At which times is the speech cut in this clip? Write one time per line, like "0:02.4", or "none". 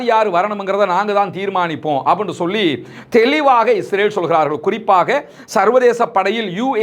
none